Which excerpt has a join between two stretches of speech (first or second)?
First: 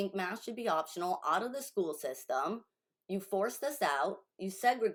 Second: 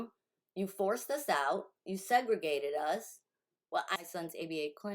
second